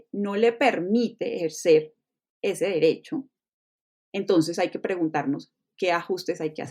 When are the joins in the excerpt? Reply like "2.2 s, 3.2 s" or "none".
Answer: none